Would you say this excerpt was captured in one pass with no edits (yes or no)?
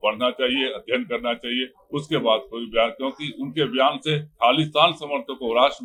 yes